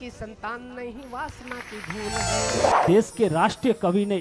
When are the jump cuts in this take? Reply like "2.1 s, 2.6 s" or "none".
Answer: 2.7 s

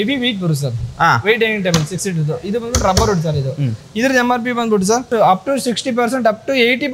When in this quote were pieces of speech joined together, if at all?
5.1 s

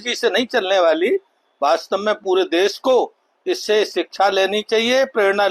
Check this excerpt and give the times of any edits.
none

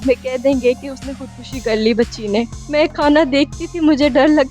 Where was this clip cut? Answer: 2.6 s

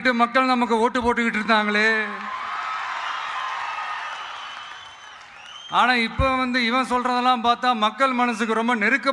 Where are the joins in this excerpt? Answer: none

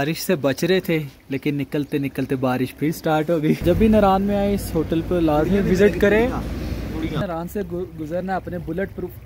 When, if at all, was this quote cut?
3.6 s, 7.2 s

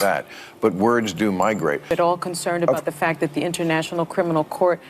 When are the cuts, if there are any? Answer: 1.9 s

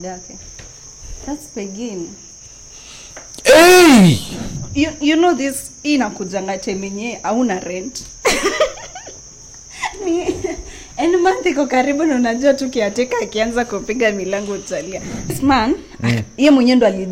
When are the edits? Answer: 4.6 s, 15.3 s

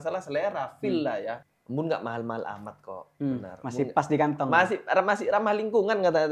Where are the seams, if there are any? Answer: 1.5 s

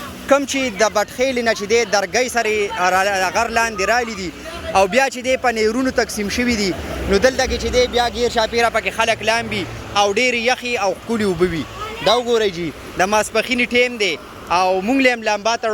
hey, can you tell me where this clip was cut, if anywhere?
none

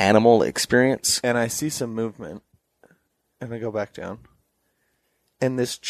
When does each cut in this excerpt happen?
1.1 s

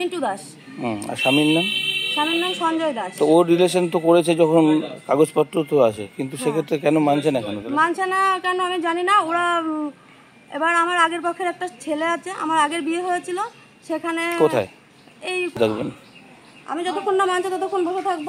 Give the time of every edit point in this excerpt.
15.6 s

